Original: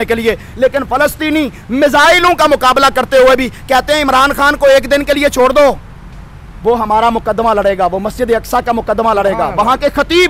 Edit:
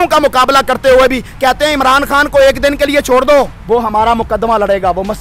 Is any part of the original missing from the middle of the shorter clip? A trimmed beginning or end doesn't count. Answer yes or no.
yes